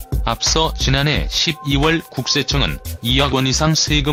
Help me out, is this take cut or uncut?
uncut